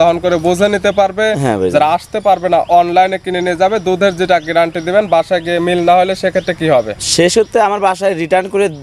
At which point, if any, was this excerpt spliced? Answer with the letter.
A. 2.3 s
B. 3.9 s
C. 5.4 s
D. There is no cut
D